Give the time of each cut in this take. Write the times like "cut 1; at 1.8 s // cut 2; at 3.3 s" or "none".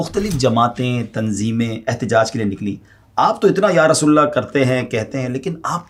none